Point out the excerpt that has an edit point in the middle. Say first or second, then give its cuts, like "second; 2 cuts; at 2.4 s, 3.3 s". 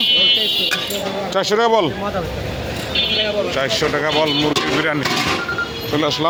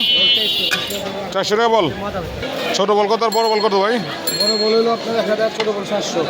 second; 1 cut; at 2.4 s